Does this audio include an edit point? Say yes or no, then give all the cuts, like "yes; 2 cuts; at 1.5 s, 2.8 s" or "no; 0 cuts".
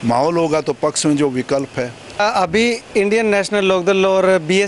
yes; 1 cut; at 2.2 s